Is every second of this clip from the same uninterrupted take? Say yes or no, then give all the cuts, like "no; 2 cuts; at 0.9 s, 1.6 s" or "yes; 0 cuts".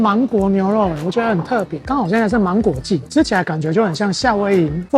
no; 1 cut; at 3.1 s